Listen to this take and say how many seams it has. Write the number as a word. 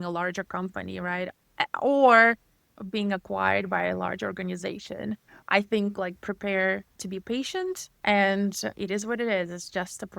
three